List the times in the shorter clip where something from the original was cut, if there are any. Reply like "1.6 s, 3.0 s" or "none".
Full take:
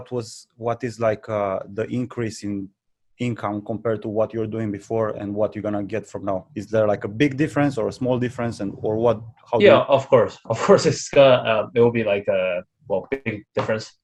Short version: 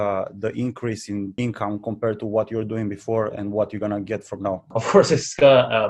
1.3 s, 4.7 s